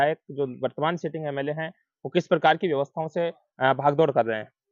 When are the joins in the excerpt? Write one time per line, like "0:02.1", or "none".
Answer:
none